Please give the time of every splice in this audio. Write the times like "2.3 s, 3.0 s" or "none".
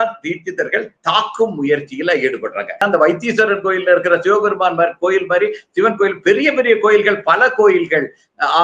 2.8 s